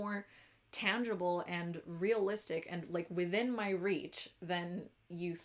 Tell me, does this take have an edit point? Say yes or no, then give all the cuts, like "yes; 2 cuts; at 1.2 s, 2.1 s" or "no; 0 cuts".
no; 0 cuts